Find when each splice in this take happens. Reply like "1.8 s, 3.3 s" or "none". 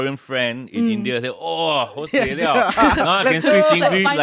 none